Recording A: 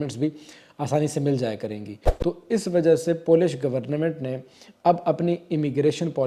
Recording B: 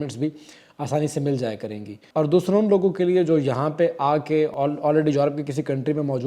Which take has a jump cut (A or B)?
A